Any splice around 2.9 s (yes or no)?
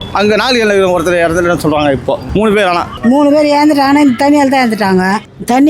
yes